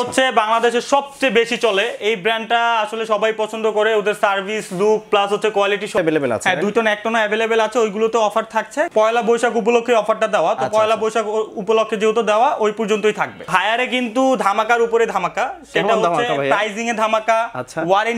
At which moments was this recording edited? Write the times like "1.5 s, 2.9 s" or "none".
6.0 s, 8.9 s, 13.5 s